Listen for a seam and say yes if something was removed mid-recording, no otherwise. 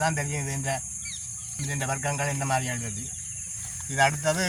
no